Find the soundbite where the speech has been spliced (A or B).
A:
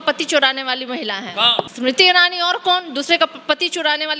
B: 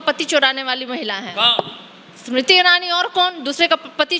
A